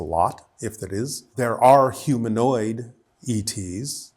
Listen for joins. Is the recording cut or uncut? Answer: cut